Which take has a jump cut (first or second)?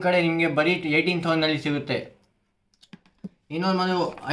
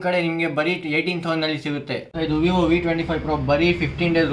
second